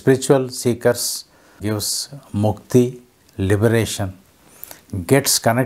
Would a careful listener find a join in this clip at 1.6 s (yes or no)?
yes